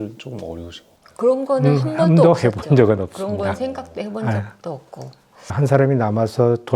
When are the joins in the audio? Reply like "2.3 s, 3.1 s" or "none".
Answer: none